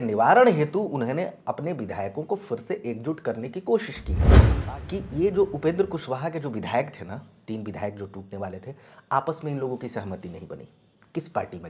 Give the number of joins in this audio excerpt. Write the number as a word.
one